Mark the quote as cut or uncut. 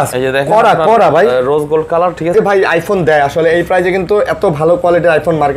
cut